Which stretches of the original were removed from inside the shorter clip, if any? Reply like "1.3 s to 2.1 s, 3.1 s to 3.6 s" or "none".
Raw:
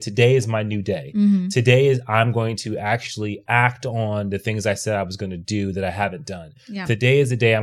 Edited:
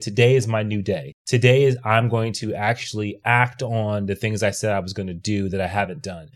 1.2 s to 1.4 s

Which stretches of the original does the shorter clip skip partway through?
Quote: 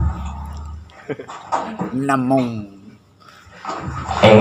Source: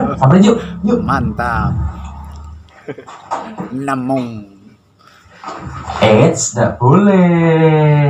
none

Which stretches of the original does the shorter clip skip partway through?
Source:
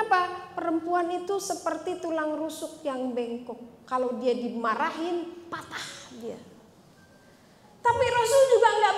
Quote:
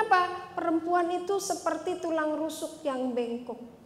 none

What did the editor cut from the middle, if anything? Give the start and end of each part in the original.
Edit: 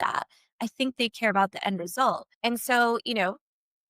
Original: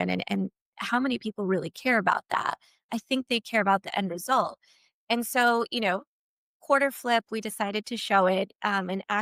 4.6 s to 4.9 s

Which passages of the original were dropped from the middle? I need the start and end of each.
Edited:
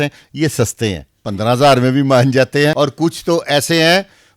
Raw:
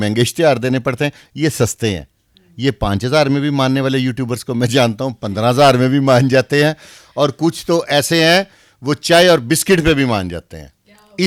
2.2 s to 5.2 s, 6.7 s to 7.2 s

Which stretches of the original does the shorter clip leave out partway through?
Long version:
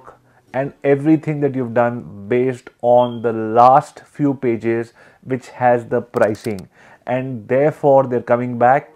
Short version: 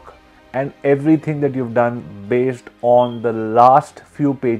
none

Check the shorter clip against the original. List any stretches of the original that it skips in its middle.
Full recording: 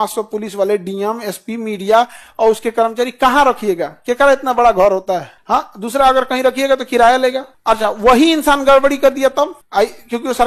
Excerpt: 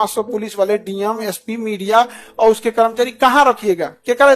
none

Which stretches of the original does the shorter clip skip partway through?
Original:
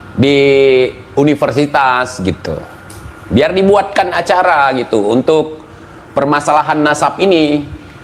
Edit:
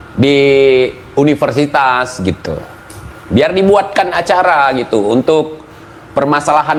none

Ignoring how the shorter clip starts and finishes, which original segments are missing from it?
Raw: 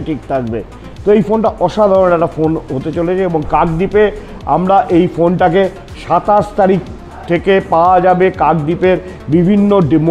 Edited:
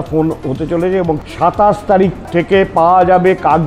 3.5 s to 5.9 s, 6.9 s to 7.2 s

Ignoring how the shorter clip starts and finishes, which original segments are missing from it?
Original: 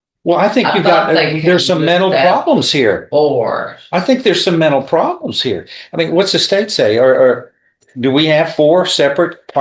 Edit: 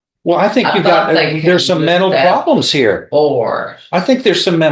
none

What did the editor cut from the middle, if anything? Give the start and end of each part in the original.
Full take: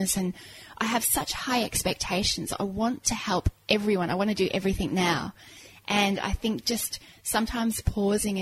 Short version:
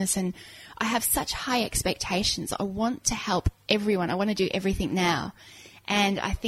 none

